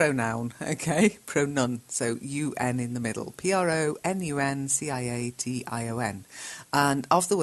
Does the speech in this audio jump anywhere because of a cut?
yes; 1 cut; at 1.5 s

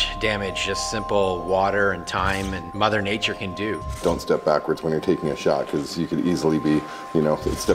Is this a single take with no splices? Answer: no; 2 cuts; at 2.7 s, 4.0 s

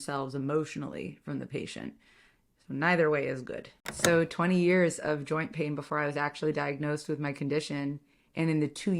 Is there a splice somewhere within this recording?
yes; 1 cut; at 3.9 s

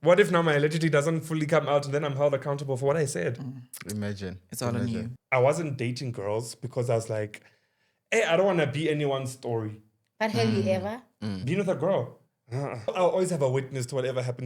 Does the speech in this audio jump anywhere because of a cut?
yes; 2 cuts; at 5.1 s, 12.9 s

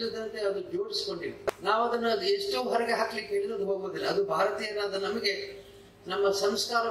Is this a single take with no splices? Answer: no; 1 cut; at 1.5 s

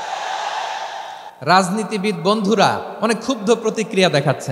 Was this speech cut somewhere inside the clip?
yes; 2 cuts; at 1.3 s, 2.9 s

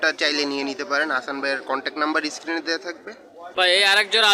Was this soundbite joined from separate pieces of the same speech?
yes; 1 cut; at 3.3 s

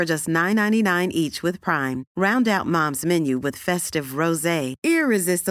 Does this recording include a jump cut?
no; 0 cuts

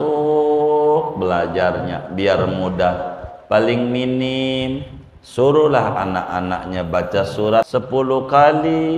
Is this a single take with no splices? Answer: no; 1 cut; at 7.7 s

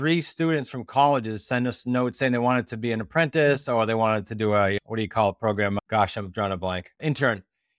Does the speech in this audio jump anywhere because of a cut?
no; 0 cuts

